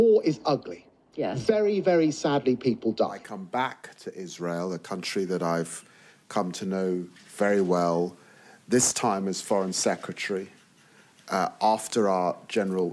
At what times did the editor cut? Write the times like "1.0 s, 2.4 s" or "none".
3.2 s